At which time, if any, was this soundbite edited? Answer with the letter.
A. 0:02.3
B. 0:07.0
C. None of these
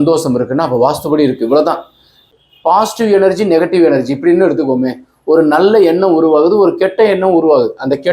A